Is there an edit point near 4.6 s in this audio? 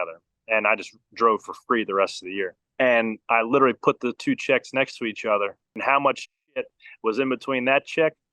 no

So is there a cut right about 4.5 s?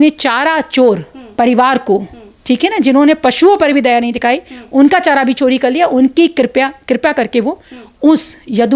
no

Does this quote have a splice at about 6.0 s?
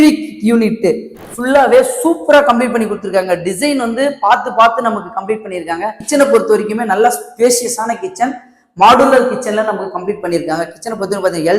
yes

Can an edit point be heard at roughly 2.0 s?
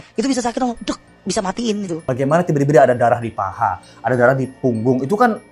yes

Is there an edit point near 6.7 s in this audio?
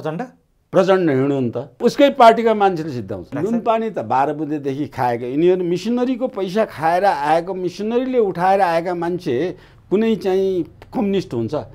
no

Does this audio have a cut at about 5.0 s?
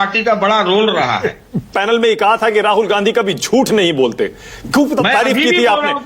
no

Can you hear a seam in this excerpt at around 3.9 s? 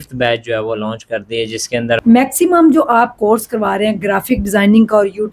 no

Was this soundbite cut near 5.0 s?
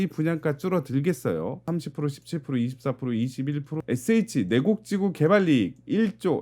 no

